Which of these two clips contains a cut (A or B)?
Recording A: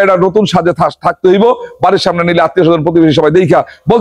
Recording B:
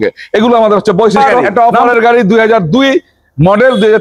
B